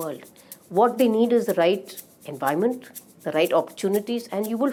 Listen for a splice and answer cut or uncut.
uncut